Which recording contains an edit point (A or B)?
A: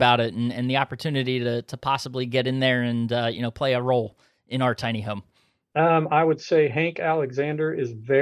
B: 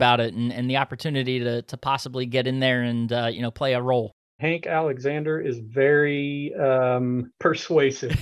B